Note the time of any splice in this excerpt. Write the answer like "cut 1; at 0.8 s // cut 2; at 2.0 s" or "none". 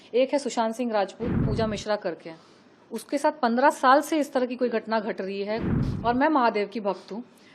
cut 1; at 1.5 s // cut 2; at 5.7 s